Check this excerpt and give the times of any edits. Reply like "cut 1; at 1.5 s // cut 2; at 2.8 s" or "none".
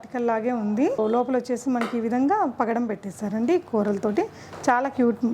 cut 1; at 1.0 s